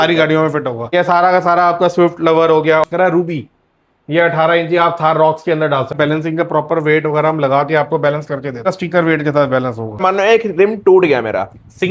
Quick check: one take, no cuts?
no; 5 cuts; at 0.9 s, 2.8 s, 5.9 s, 8.7 s, 10.0 s

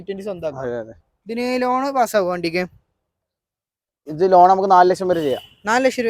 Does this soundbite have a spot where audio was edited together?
no; 0 cuts

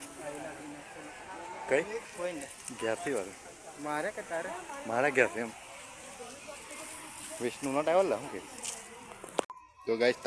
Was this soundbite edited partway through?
no; 0 cuts

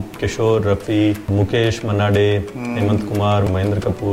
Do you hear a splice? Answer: yes; 2 cuts; at 1.2 s, 3.5 s

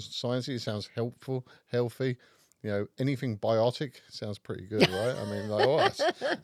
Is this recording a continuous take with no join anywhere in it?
yes; 0 cuts

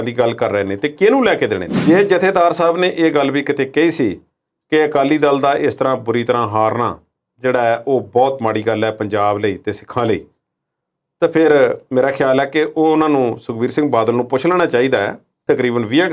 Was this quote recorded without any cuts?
no; 1 cut; at 1.7 s

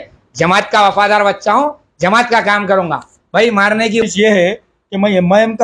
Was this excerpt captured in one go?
no; 1 cut; at 4.0 s

